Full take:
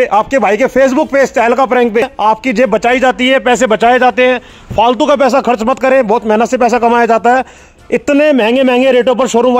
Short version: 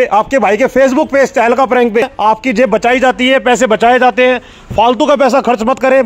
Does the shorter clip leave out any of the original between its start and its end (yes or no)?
no